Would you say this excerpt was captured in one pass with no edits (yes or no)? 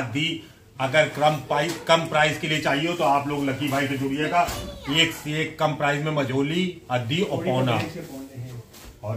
yes